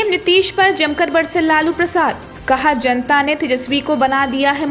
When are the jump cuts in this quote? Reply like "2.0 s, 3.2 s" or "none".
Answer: none